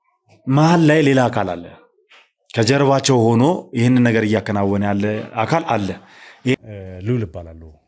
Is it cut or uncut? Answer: cut